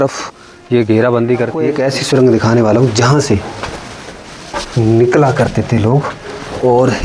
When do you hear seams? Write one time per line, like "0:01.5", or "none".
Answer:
0:01.5